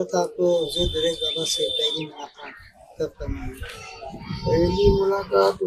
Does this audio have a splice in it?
no; 0 cuts

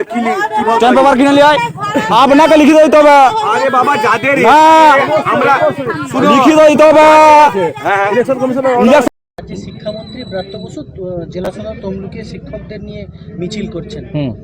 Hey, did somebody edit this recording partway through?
yes; 1 cut; at 9.1 s

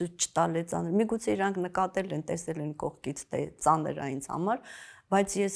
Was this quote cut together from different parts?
no; 0 cuts

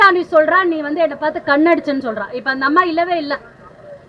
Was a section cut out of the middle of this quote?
no; 0 cuts

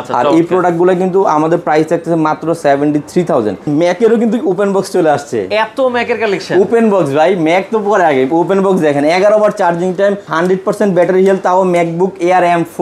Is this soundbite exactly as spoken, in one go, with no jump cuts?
no; 2 cuts; at 3.7 s, 10.3 s

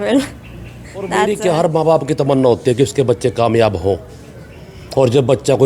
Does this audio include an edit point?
yes; 1 cut; at 1.2 s

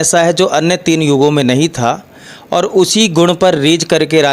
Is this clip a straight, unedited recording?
yes; 0 cuts

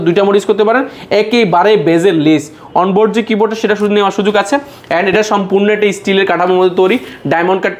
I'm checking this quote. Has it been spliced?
no; 0 cuts

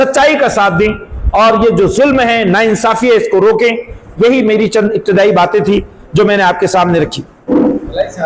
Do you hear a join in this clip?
no; 0 cuts

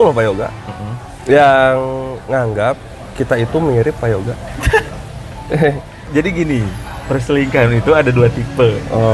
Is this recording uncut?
no; 1 cut; at 6.0 s

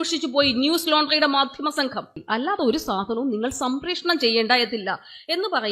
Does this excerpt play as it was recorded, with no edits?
no; 1 cut; at 2.2 s

